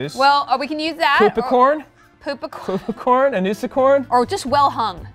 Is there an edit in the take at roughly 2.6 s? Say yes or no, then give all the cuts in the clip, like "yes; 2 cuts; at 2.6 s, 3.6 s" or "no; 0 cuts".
no; 1 cut; at 4.1 s